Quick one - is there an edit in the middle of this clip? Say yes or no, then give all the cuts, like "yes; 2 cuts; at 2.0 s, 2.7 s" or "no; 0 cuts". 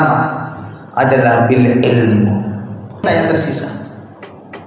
yes; 1 cut; at 3.0 s